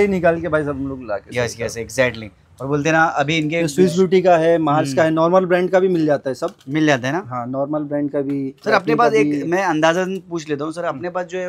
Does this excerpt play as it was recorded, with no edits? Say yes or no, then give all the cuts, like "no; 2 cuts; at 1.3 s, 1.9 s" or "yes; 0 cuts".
yes; 0 cuts